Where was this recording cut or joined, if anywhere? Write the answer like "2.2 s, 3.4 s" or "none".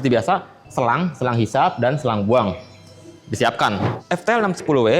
3.9 s